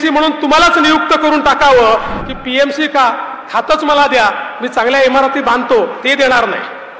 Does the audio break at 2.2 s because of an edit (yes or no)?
yes